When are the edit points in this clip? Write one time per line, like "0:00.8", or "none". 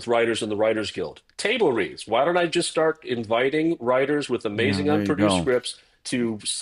none